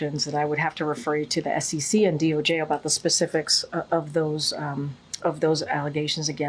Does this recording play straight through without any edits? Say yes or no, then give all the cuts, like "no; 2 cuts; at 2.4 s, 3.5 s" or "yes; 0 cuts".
yes; 0 cuts